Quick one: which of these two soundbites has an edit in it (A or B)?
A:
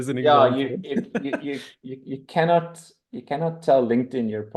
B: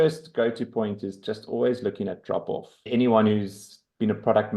B